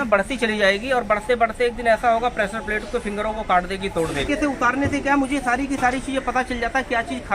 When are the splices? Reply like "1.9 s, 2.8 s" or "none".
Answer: 4.2 s